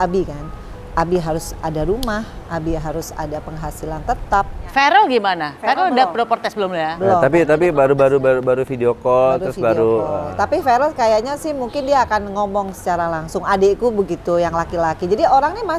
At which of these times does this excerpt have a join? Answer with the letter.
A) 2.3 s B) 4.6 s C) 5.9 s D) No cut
B